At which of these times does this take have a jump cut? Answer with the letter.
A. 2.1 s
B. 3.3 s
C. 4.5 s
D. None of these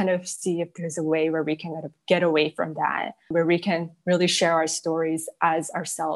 B